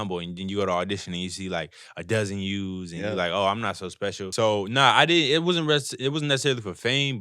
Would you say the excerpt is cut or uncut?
cut